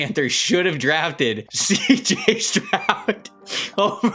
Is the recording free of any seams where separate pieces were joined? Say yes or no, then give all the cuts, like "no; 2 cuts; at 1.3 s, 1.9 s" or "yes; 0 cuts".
no; 1 cut; at 1.5 s